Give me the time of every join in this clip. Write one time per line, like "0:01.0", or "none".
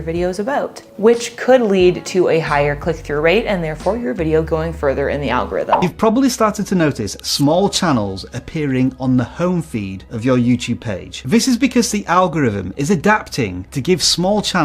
0:05.7